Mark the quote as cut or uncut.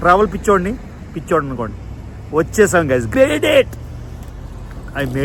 cut